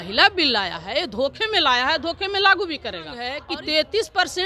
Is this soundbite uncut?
no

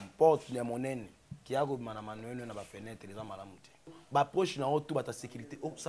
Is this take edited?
yes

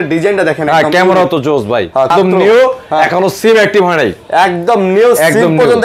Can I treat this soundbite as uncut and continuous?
no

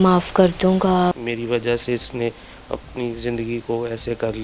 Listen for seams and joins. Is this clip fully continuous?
no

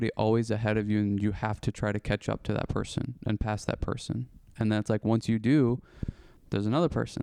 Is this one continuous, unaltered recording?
yes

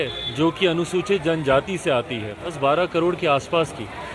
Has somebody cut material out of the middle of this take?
yes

